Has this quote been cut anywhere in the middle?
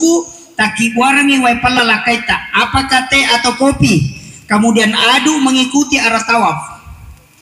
no; 0 cuts

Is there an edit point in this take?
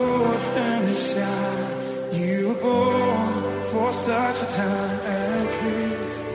no; 0 cuts

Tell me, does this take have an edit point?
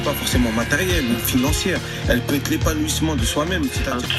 no; 0 cuts

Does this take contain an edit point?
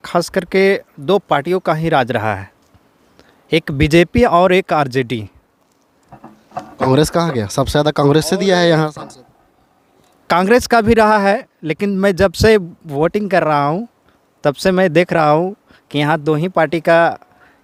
no; 0 cuts

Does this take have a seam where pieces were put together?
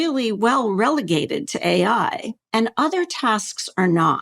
yes; 1 cut; at 2.3 s

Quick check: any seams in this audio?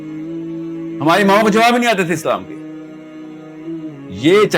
no; 0 cuts

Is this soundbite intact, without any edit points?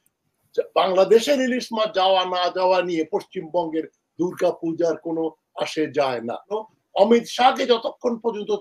no; 1 cut; at 6.6 s

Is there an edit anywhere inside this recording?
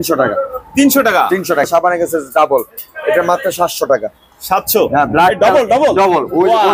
no; 0 cuts

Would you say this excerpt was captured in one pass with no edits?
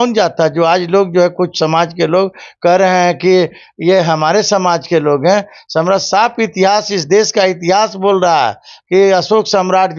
yes; 0 cuts

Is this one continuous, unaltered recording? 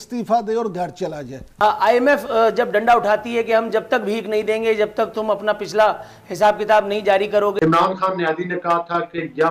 no; 2 cuts; at 1.4 s, 7.5 s

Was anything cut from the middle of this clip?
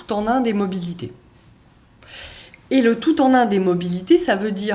no; 0 cuts

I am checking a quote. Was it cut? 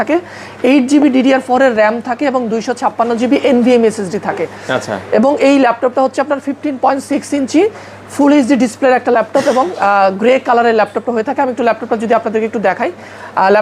no; 0 cuts

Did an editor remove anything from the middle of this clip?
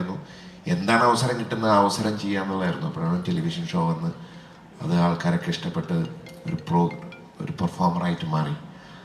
no; 0 cuts

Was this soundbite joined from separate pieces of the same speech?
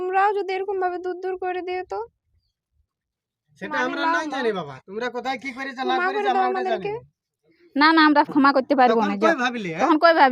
no; 0 cuts

